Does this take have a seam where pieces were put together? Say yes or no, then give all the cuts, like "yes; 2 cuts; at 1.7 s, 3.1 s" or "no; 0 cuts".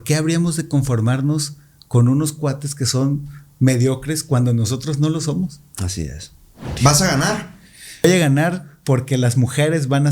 yes; 2 cuts; at 6.7 s, 8.0 s